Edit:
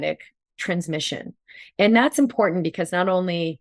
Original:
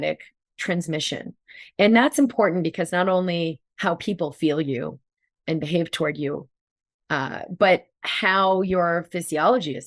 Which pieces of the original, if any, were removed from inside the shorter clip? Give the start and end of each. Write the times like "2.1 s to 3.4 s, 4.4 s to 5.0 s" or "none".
none